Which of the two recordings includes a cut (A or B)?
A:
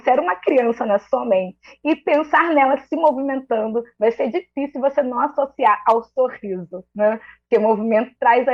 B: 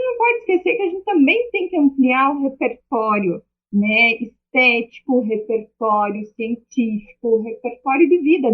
B